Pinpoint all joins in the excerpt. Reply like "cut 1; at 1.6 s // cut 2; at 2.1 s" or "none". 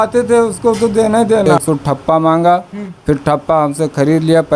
cut 1; at 1.5 s